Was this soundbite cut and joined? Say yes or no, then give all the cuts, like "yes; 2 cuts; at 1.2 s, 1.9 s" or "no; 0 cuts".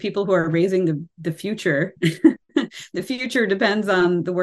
no; 0 cuts